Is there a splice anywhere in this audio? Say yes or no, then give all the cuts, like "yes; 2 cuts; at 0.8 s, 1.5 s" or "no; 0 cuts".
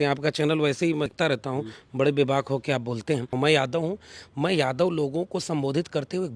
yes; 2 cuts; at 1.1 s, 3.3 s